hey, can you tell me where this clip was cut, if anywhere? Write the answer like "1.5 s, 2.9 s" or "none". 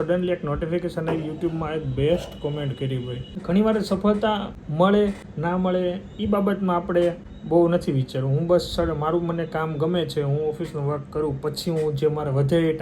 3.3 s, 4.6 s, 5.3 s, 7.3 s